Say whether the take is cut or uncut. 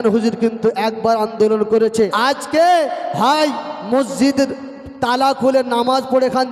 cut